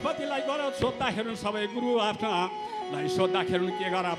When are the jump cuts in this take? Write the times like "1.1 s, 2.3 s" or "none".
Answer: none